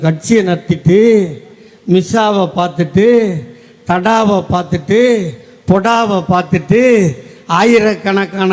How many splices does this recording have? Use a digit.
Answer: 0